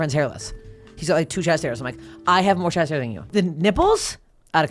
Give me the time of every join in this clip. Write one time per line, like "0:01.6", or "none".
0:03.3